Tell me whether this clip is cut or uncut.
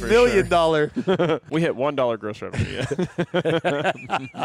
cut